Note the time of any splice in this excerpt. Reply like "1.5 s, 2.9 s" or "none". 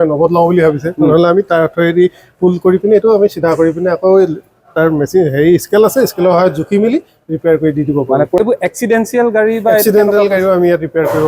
8.6 s